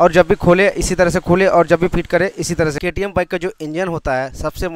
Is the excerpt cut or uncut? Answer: cut